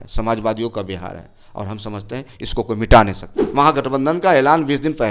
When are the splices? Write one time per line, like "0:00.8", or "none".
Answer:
0:03.4